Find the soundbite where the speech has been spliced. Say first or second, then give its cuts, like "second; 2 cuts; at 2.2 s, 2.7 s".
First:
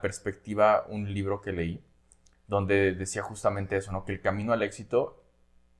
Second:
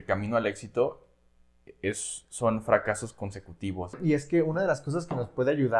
second; 1 cut; at 4.2 s